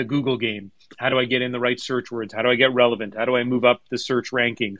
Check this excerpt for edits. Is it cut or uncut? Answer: uncut